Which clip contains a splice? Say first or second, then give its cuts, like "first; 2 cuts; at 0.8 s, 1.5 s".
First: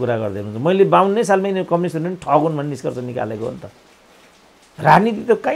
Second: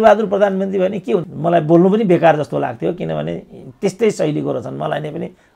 second; 1 cut; at 1.2 s